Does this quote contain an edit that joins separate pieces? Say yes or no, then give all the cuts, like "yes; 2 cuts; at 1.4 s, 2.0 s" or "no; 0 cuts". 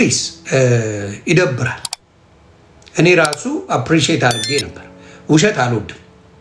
no; 0 cuts